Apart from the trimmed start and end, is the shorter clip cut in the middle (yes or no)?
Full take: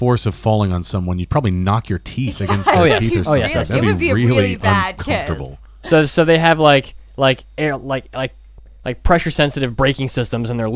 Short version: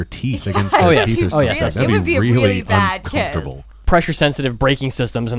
yes